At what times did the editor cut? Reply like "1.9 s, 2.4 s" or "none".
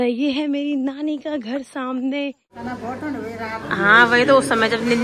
2.6 s